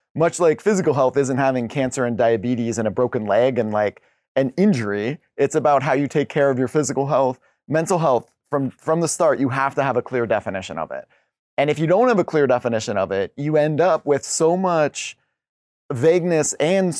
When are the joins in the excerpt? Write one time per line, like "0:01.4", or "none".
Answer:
none